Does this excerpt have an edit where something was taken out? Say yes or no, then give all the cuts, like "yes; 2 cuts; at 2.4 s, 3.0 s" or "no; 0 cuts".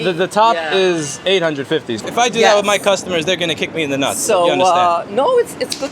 yes; 1 cut; at 1.9 s